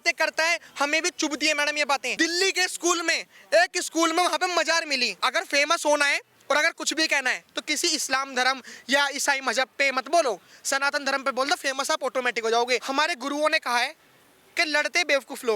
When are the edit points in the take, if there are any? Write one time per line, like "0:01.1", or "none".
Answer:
0:02.1
0:05.1
0:12.8